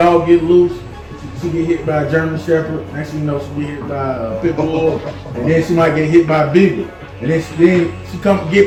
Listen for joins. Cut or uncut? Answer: uncut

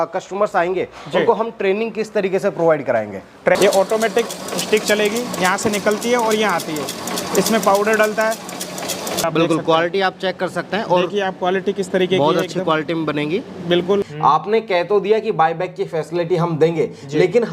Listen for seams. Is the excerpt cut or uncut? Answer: cut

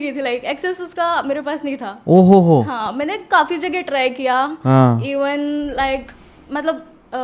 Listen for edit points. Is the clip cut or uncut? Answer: uncut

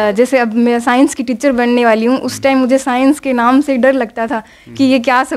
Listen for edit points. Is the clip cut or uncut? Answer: uncut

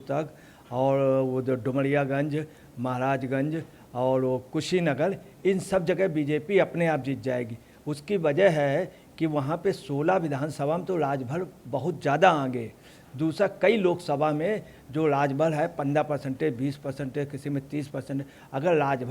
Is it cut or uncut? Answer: uncut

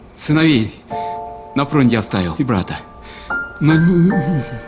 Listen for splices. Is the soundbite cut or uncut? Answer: uncut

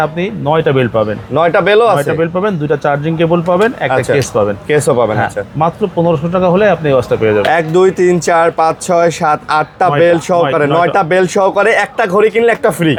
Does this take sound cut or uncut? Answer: uncut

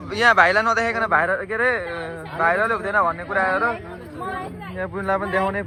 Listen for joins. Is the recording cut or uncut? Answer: uncut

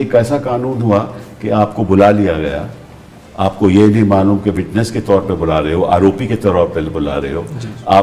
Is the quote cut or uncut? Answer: uncut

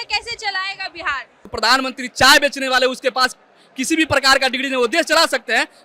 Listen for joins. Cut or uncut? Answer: cut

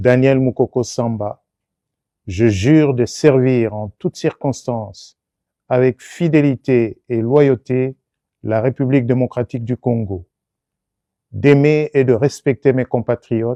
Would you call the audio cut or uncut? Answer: uncut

